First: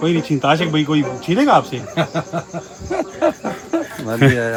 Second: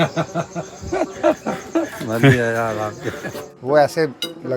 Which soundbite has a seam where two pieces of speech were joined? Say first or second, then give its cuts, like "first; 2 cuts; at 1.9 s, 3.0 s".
second; 1 cut; at 3.6 s